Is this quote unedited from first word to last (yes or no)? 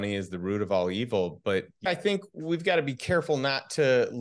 no